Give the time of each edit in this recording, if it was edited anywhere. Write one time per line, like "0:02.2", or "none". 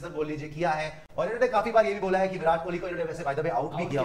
none

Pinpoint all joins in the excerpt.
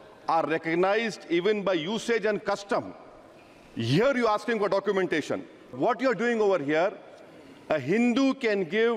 0:05.7

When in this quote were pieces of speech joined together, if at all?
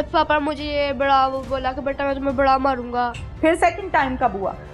0:03.2

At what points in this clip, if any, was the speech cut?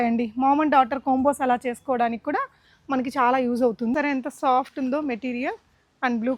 0:03.9

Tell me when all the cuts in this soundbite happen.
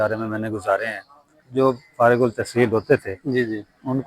0:01.4

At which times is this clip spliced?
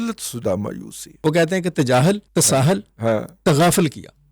0:01.2
0:02.2

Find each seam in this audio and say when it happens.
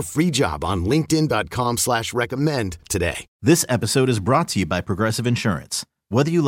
0:03.3

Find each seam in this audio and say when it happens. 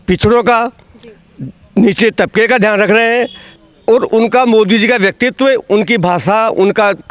none

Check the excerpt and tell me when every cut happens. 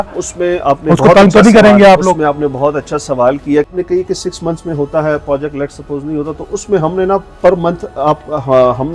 0:03.7

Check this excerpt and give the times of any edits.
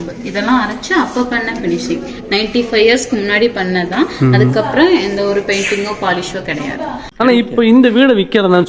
0:07.0

